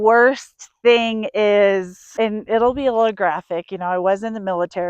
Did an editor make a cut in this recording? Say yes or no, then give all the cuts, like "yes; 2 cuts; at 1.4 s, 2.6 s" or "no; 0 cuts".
yes; 1 cut; at 2.0 s